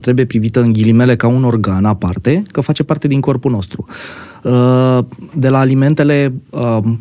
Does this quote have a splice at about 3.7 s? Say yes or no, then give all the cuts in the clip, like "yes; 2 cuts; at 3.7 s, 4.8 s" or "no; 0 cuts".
no; 0 cuts